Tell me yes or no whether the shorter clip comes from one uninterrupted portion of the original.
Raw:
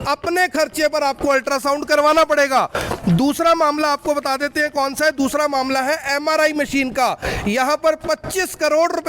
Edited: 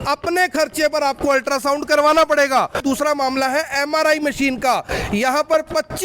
no